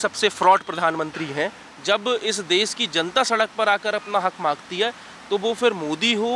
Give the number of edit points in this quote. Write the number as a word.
one